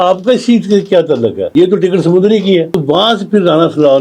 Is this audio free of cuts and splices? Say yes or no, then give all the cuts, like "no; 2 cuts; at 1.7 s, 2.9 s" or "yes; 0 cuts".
no; 2 cuts; at 1.4 s, 2.8 s